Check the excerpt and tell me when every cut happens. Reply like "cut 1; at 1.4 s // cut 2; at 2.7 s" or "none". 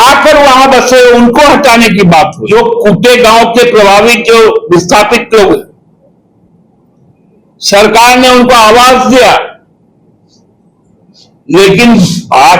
cut 1; at 2.4 s

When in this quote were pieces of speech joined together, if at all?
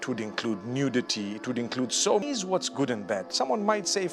cut 1; at 2.2 s

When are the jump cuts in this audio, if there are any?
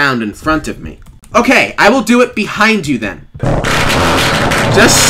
cut 1; at 3.4 s

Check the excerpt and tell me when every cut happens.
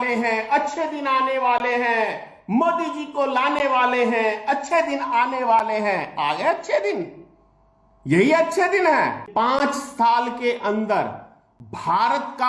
cut 1; at 9.3 s

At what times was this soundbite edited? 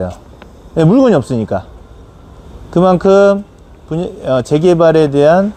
none

